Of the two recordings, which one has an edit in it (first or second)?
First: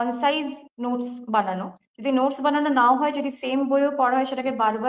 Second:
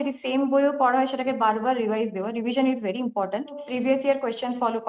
second